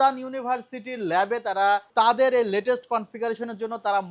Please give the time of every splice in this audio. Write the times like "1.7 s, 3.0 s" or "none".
1.9 s